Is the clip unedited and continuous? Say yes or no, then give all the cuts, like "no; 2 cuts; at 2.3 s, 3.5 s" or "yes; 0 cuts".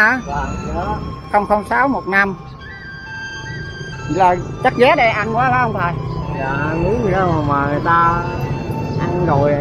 yes; 0 cuts